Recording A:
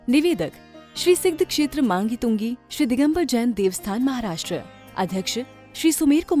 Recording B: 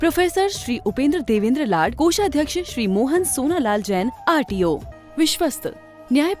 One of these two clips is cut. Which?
B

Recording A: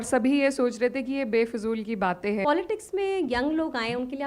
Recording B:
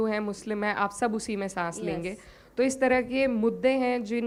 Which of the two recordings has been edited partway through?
A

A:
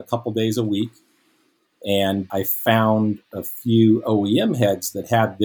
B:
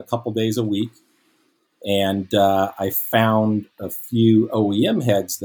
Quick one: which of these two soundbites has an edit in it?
A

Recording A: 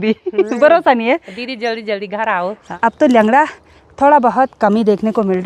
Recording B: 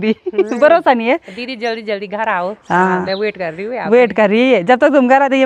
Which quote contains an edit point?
A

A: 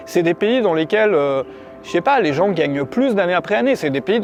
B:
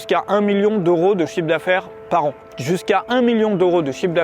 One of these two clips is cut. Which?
B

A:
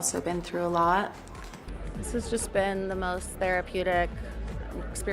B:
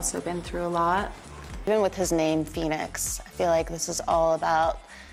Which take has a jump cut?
A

